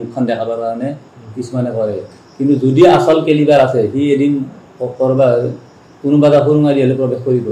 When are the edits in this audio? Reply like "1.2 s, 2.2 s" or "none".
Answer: none